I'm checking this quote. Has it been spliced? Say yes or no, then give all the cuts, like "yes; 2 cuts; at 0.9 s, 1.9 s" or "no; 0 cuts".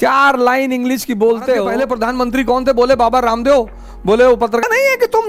yes; 2 cuts; at 1.7 s, 4.2 s